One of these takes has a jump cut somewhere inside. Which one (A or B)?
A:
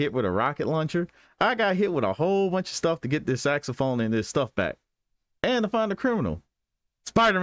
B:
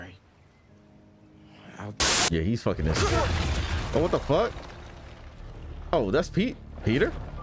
B